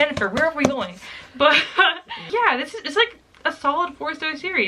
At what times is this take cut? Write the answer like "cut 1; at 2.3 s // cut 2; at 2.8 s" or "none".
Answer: none

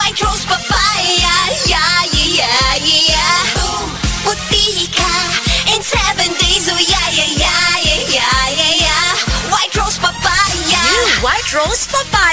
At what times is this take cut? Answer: none

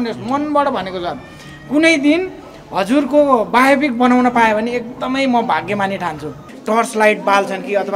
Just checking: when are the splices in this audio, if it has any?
cut 1; at 6.5 s

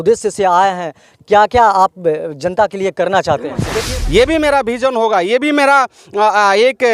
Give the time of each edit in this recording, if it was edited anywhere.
cut 1; at 3.7 s

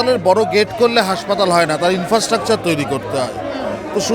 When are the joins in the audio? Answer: none

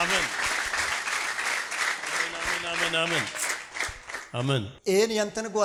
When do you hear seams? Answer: none

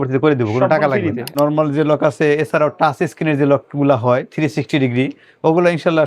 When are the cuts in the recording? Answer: cut 1; at 1.4 s

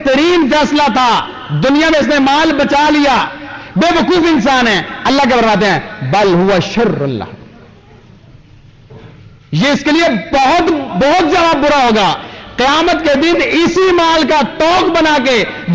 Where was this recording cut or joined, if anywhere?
none

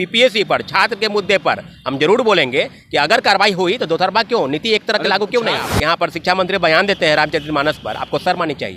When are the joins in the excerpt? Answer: cut 1; at 5.7 s

